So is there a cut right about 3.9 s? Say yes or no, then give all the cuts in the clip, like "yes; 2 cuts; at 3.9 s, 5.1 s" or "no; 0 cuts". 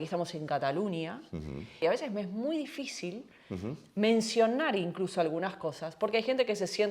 no; 1 cut; at 1.8 s